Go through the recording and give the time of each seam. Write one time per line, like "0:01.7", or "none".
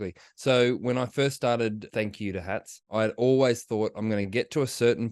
0:01.8
0:02.9